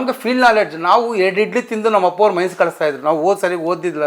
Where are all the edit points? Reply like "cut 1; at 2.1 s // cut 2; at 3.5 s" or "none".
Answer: none